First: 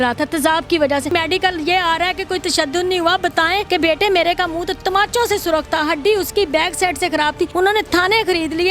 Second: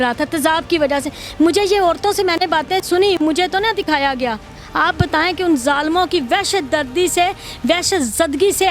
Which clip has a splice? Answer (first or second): first